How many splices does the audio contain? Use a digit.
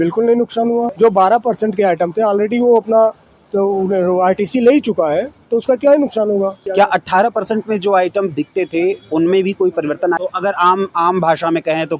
3